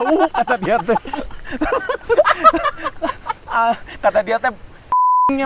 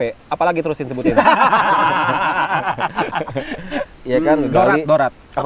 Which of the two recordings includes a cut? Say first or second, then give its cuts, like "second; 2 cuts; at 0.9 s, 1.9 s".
second; 1 cut; at 3.9 s